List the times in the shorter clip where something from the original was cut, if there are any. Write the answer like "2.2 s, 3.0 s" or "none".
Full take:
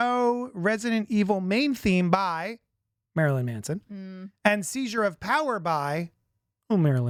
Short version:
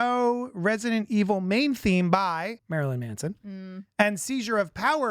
2.6 s